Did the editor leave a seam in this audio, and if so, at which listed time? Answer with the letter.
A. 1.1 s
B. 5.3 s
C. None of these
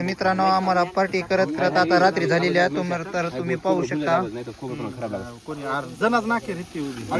C